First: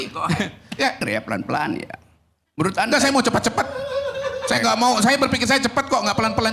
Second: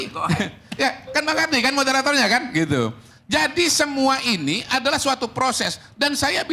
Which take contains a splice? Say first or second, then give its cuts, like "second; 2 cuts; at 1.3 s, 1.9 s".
first; 1 cut; at 1.0 s